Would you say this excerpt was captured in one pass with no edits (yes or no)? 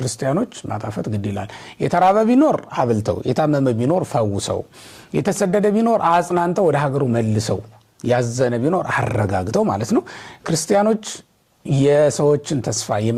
yes